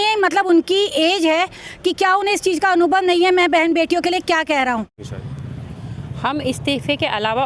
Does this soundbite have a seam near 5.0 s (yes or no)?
yes